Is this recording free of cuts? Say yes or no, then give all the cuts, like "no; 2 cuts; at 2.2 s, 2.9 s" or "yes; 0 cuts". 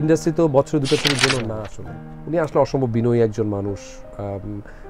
no; 1 cut; at 1.7 s